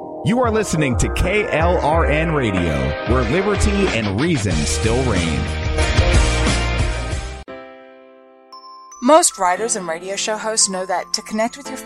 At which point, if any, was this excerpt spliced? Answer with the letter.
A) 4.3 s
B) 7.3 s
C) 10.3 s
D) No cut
B